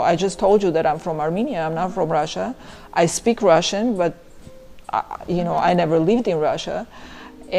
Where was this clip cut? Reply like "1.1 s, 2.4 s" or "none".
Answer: none